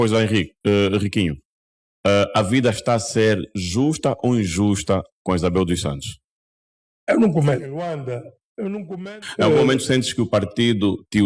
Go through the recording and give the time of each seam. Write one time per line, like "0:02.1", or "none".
0:09.0